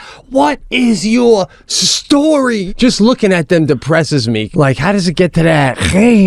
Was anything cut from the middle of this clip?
yes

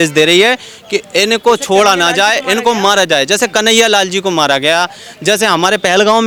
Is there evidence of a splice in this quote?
no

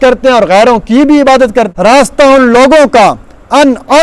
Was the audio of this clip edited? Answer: yes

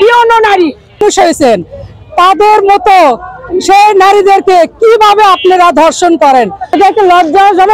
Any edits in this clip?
yes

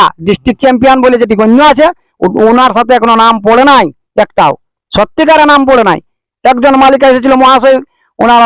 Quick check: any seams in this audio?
no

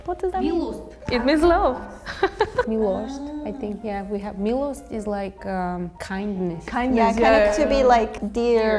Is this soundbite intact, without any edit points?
yes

